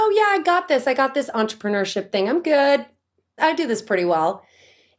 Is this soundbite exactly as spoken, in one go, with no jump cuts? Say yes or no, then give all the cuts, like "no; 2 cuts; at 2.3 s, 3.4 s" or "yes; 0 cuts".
no; 1 cut; at 3.4 s